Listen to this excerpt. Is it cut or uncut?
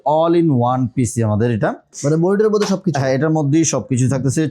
cut